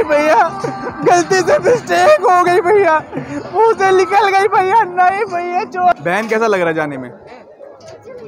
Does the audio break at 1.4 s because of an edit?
no; 1 cut; at 5.9 s

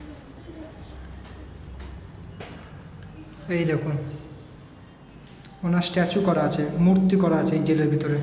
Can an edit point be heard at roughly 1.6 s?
no; 0 cuts

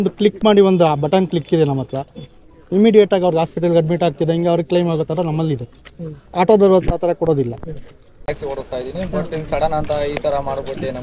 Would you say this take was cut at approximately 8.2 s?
yes; 1 cut; at 8.2 s

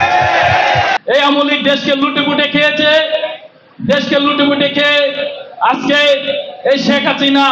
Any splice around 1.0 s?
yes; 1 cut; at 1.0 s

